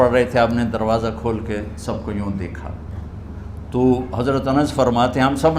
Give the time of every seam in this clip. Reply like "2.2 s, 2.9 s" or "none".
none